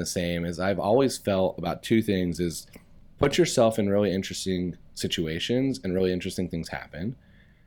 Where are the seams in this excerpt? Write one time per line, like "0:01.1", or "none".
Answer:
none